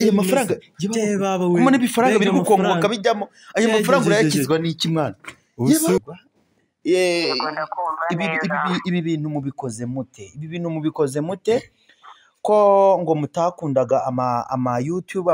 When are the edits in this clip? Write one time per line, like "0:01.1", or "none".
0:06.0

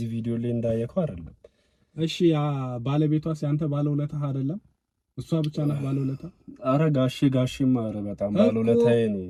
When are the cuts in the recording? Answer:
none

